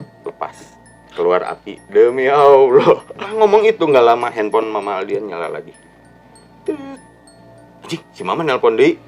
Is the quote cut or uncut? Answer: cut